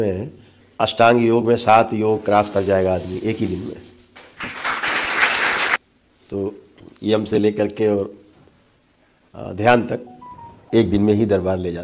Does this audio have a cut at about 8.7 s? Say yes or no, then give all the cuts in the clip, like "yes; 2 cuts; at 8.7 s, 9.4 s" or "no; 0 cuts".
no; 1 cut; at 5.8 s